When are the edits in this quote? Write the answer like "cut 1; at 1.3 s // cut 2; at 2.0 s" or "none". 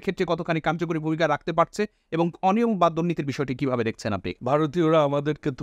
cut 1; at 4.3 s